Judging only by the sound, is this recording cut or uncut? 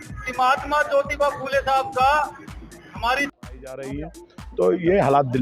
cut